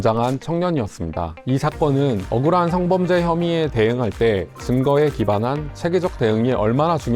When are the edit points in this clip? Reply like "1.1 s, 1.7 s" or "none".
1.3 s